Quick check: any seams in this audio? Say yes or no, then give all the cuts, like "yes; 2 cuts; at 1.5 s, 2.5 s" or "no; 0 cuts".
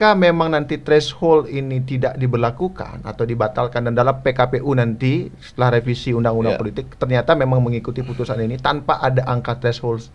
no; 0 cuts